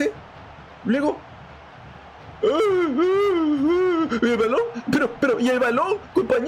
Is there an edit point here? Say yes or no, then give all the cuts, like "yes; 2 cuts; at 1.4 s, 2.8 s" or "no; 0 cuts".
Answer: no; 0 cuts